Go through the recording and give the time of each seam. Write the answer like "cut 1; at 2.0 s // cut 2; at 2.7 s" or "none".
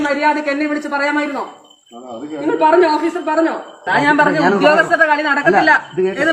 cut 1; at 3.7 s